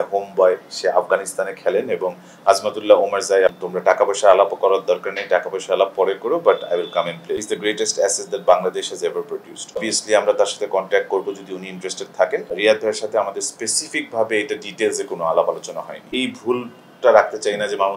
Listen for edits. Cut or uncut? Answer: cut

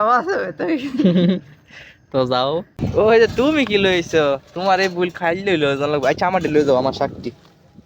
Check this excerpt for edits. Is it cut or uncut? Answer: cut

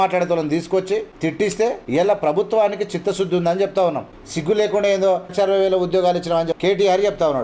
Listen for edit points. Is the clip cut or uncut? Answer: cut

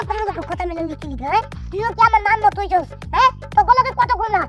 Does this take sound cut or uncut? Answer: uncut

